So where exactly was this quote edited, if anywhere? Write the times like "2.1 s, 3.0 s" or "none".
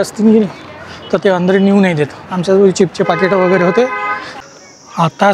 4.3 s